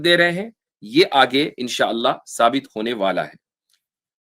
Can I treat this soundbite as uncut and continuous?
yes; 0 cuts

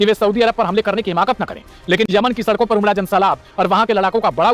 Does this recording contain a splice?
no; 0 cuts

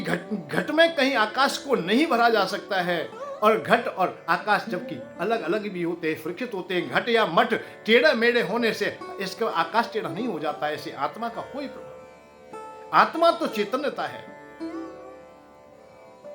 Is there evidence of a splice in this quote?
yes; 1 cut; at 14.1 s

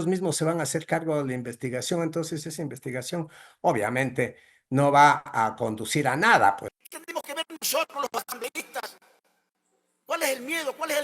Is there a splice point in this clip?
yes; 1 cut; at 6.7 s

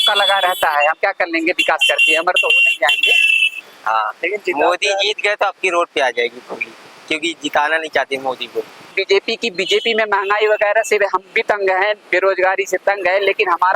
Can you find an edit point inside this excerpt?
yes; 2 cuts; at 3.5 s, 8.9 s

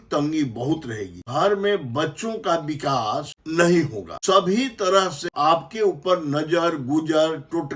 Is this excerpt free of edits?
no; 4 cuts; at 1.2 s, 3.4 s, 4.1 s, 5.3 s

